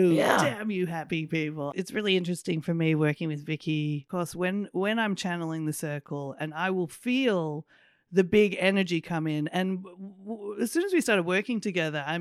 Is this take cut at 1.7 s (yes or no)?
yes